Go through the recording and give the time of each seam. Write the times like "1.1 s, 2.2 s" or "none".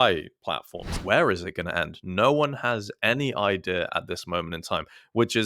0.9 s

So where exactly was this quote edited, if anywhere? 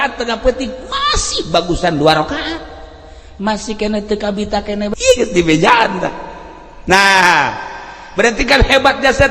4.9 s

